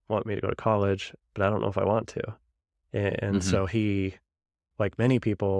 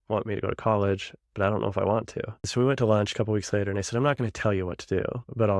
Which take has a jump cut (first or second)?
second